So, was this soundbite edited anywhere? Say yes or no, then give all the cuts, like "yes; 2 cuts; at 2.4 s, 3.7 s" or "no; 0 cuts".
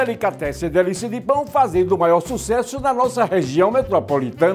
no; 0 cuts